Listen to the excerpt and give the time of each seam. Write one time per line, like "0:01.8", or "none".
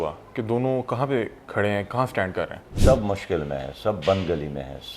0:02.7